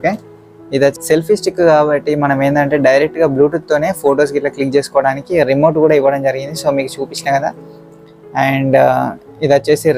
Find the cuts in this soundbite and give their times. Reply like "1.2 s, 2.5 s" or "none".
0.9 s